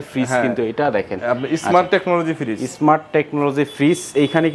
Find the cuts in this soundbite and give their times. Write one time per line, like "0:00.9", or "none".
none